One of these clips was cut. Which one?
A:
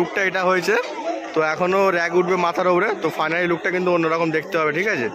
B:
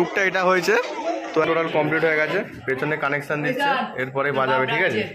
B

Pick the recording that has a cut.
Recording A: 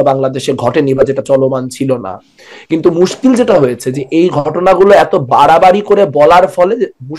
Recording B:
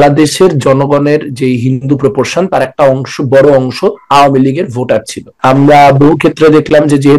B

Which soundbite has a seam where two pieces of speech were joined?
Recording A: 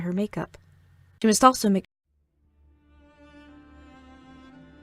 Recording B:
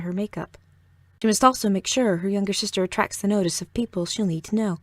B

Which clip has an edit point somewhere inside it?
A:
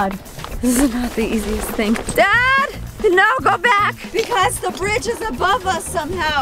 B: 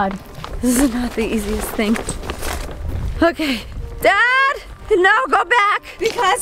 A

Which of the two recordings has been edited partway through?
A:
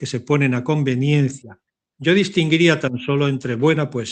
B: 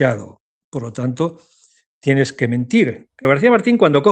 B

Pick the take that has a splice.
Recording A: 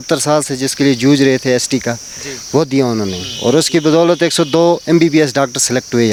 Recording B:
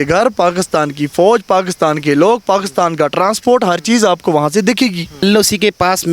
B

